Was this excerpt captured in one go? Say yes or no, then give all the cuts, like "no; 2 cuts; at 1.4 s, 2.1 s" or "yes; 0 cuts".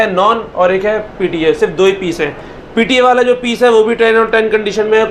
yes; 0 cuts